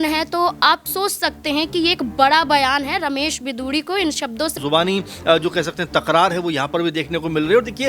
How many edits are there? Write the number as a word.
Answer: one